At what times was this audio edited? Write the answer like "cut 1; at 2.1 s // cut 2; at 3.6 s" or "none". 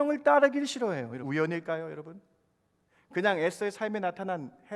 cut 1; at 1.2 s

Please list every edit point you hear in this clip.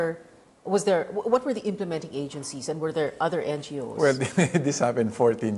cut 1; at 2.4 s

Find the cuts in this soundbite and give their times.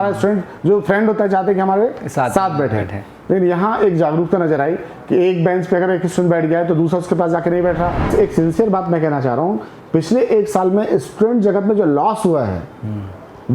cut 1; at 8.1 s

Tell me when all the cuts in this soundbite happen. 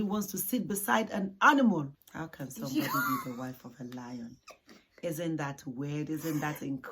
cut 1; at 2.0 s

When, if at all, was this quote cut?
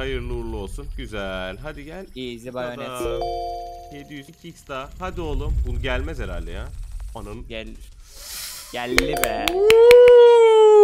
cut 1; at 4.3 s

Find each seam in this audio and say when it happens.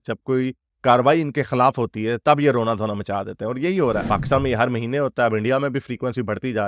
cut 1; at 4.0 s

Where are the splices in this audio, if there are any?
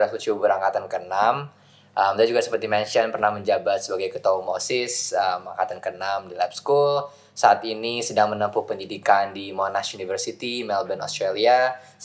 none

